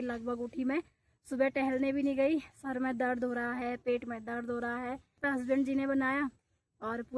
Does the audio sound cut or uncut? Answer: cut